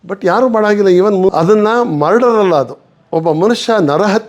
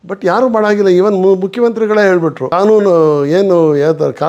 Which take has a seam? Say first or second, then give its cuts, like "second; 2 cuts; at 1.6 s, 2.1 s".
first; 1 cut; at 1.3 s